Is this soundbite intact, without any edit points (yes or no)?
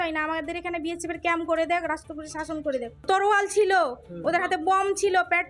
no